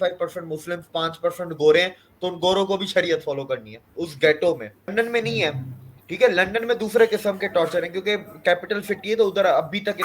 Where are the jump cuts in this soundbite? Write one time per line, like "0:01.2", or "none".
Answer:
0:04.9